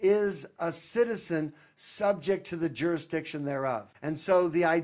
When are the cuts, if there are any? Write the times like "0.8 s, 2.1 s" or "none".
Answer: 3.9 s